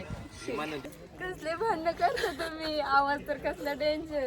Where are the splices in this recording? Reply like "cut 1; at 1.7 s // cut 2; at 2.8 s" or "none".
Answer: cut 1; at 1.0 s